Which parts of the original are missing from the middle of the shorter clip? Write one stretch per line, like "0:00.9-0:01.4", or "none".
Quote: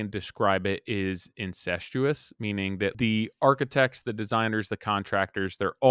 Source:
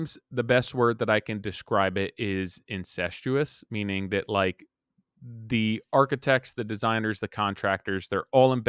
0:04.3-0:05.5